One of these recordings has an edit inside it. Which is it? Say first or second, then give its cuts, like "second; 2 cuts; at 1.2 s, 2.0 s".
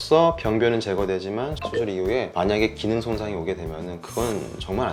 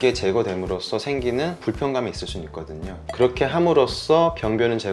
second; 1 cut; at 3.0 s